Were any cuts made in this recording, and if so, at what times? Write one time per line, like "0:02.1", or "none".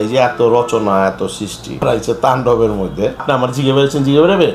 0:01.8
0:03.2